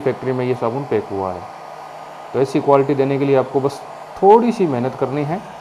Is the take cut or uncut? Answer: uncut